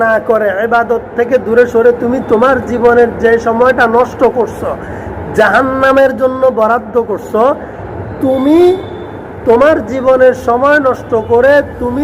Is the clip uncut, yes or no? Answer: no